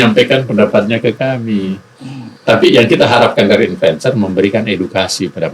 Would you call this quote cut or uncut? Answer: uncut